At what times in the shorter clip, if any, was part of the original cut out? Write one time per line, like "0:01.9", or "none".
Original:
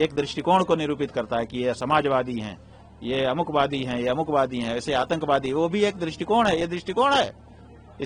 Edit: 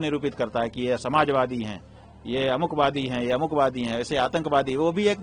none